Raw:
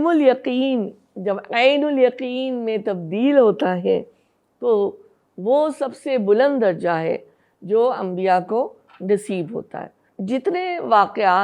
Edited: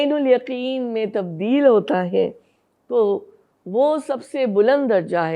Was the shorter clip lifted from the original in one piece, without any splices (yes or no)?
yes